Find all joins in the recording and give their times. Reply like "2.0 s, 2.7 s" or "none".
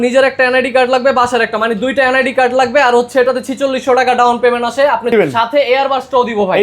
5.1 s